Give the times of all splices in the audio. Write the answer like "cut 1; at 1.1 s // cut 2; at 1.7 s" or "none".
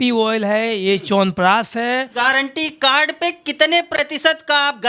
cut 1; at 2.1 s